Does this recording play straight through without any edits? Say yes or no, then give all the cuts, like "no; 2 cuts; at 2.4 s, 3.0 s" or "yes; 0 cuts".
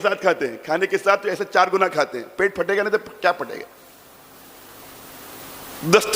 yes; 0 cuts